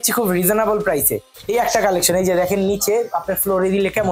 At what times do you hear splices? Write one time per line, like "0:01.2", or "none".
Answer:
0:01.3